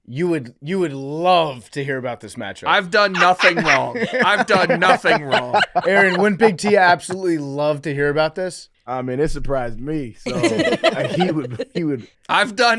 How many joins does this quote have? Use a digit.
1